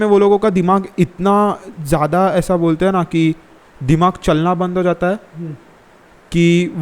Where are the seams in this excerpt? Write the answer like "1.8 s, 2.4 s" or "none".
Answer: none